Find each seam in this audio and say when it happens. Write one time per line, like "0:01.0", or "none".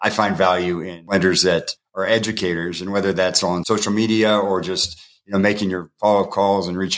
0:00.9